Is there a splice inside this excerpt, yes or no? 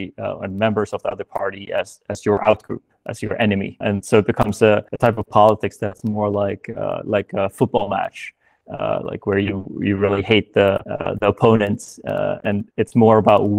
yes